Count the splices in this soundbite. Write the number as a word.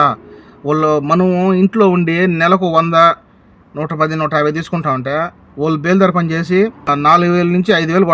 one